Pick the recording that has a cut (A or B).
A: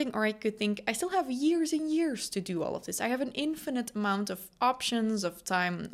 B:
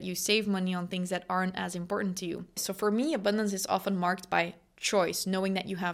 B